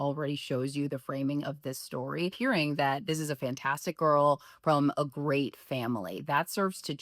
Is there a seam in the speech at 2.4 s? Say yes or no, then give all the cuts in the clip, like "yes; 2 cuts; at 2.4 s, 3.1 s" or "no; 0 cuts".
yes; 1 cut; at 2.4 s